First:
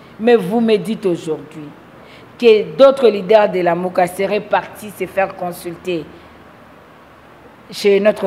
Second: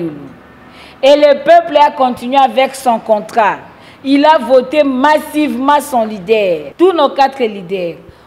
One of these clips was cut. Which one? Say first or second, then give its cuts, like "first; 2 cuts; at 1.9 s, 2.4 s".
second; 1 cut; at 6.7 s